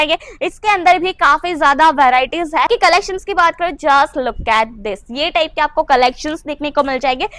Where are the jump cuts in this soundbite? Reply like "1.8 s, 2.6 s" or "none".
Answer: 2.7 s